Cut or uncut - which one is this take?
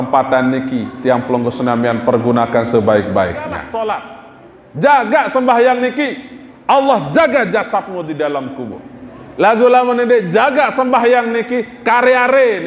cut